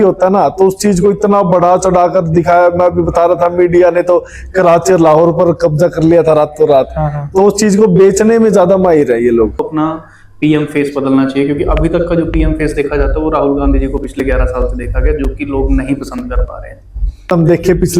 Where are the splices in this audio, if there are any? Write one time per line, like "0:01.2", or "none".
0:09.6
0:17.3